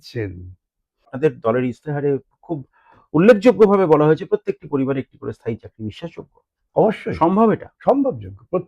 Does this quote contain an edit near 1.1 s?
yes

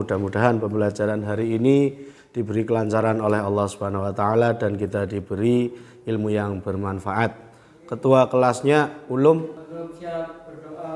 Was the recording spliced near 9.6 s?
yes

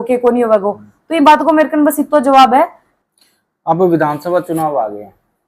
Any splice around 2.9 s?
yes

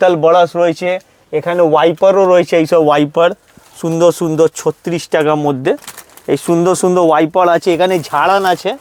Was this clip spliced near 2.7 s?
no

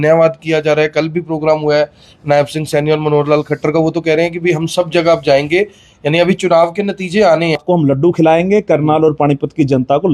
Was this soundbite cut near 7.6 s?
yes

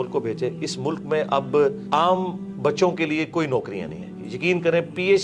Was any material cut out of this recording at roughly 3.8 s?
no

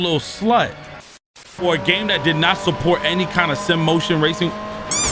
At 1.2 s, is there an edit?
yes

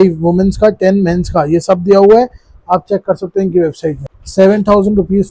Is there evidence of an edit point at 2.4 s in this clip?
no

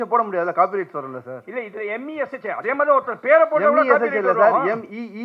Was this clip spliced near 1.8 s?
no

